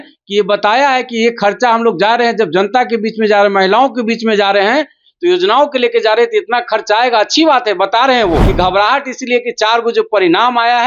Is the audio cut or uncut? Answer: cut